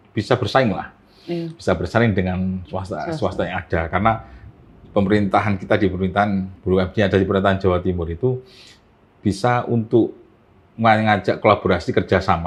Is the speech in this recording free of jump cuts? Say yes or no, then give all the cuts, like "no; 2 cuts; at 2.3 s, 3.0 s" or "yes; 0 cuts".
yes; 0 cuts